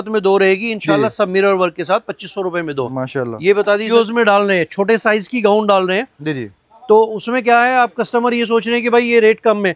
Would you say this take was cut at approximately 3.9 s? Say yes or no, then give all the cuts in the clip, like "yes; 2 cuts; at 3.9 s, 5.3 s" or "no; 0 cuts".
yes; 1 cut; at 3.9 s